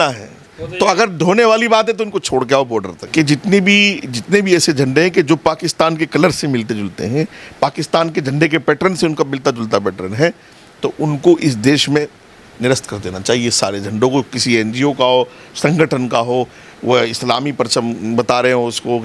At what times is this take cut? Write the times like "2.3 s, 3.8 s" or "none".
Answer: 3.0 s